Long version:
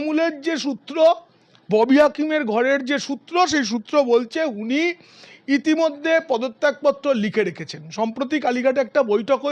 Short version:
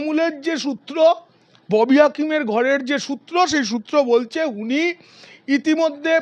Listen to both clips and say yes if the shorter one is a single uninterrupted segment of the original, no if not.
yes